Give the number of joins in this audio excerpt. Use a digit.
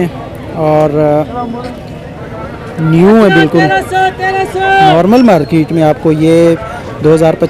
0